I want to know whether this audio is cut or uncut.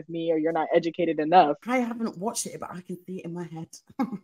cut